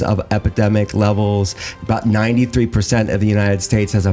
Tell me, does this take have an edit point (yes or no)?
no